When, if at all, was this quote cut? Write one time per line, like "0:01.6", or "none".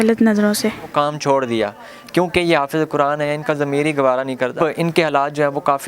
0:00.9
0:04.6